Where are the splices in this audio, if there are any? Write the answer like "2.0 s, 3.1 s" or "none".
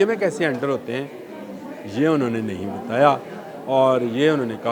none